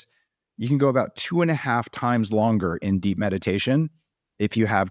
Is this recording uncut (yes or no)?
yes